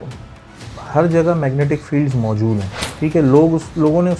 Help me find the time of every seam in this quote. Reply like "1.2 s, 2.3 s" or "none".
2.8 s